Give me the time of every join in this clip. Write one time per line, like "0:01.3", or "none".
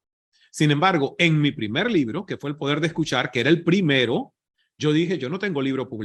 none